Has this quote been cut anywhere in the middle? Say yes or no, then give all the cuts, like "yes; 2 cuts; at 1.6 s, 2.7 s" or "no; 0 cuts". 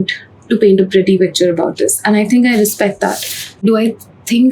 yes; 1 cut; at 3.5 s